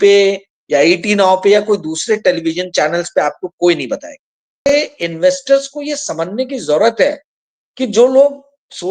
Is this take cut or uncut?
cut